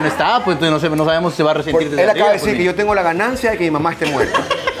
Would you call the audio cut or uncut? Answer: uncut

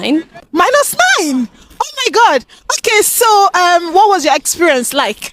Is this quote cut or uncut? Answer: uncut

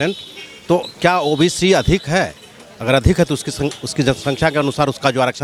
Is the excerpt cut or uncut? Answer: uncut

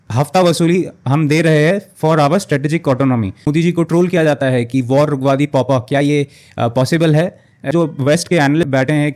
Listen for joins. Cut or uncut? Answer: cut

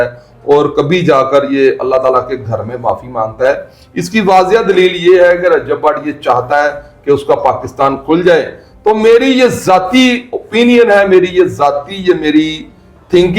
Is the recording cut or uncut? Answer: uncut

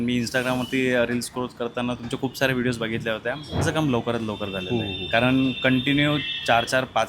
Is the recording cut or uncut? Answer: cut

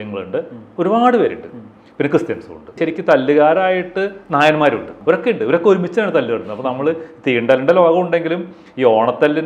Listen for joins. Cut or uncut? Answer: cut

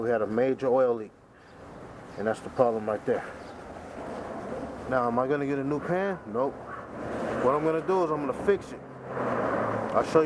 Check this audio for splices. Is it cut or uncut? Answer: cut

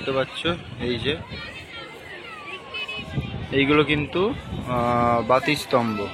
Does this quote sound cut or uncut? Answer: uncut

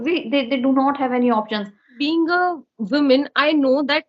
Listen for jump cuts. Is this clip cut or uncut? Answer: cut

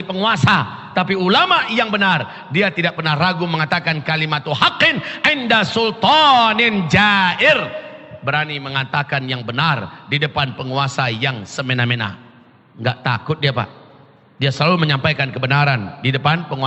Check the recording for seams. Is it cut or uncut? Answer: uncut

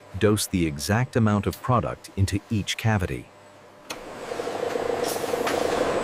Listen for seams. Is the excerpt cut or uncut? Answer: uncut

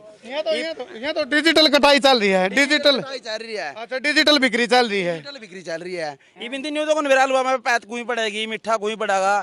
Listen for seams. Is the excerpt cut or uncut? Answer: uncut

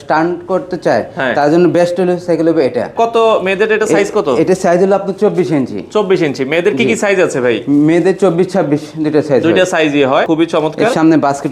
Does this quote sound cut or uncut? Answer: cut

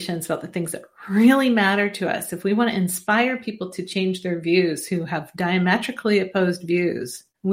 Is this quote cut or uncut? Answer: uncut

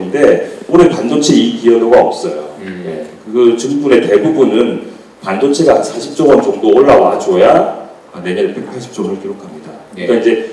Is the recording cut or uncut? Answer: uncut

